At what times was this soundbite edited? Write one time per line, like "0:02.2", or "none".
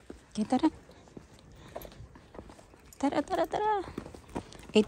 none